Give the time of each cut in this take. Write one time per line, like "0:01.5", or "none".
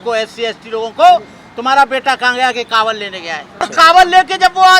0:03.7